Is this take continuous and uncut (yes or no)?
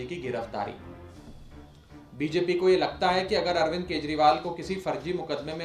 yes